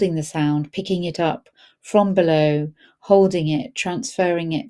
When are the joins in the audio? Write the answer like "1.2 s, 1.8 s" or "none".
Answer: none